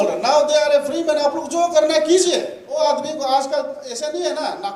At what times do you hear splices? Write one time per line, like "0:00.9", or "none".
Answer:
0:02.8